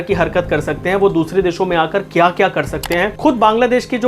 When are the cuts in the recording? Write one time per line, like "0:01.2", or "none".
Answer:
0:03.1